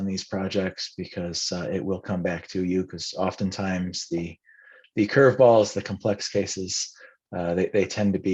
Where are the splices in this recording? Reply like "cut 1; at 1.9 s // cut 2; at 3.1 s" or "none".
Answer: none